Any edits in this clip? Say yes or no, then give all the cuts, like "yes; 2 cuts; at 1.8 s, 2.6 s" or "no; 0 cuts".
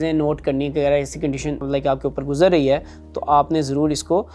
yes; 1 cut; at 1.6 s